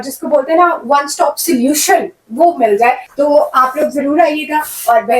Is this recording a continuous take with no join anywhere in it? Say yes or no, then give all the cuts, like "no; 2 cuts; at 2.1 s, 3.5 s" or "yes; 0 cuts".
no; 1 cut; at 3.0 s